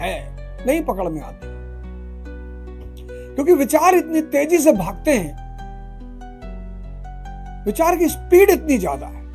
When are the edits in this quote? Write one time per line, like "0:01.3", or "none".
0:01.3
0:03.3
0:05.4
0:07.1